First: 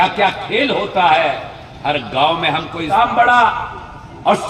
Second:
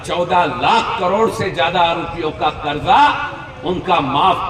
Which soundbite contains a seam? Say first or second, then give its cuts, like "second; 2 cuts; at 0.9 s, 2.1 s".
first; 1 cut; at 2.9 s